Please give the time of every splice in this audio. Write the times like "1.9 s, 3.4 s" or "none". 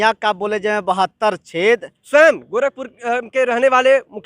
1.9 s